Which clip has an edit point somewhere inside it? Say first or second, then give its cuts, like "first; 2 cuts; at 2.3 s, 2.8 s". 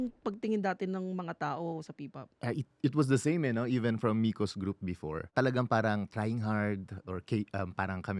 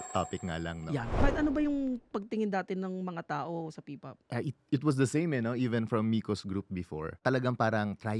second; 1 cut; at 1.0 s